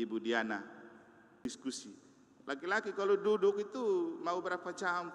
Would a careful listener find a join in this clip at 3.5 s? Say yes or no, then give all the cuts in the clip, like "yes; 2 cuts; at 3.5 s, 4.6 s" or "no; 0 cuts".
no; 1 cut; at 1.4 s